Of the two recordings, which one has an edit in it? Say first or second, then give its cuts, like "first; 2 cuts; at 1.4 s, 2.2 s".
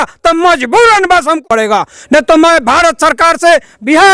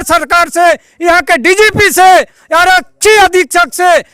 first; 1 cut; at 1.4 s